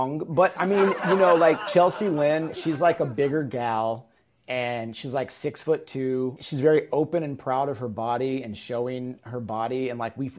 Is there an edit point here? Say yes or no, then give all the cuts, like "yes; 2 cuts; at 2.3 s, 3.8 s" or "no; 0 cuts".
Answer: yes; 2 cuts; at 2.5 s, 6.4 s